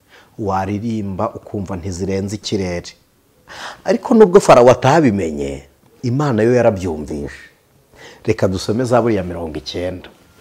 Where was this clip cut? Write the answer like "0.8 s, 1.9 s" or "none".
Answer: none